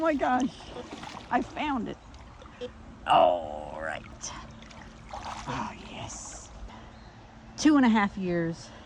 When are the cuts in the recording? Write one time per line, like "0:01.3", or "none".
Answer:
0:06.6